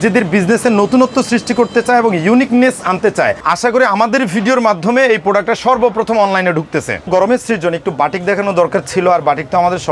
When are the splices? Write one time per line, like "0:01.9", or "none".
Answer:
0:03.4
0:07.0